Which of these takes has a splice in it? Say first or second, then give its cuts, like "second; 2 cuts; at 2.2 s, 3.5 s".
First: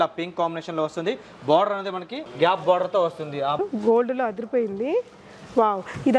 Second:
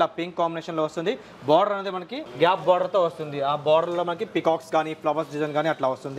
first; 1 cut; at 3.6 s